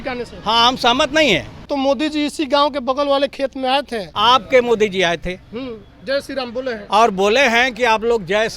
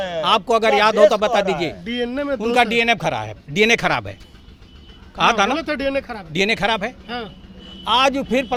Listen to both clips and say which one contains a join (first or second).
first